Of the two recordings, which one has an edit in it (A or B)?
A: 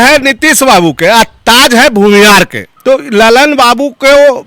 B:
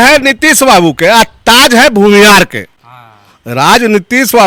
A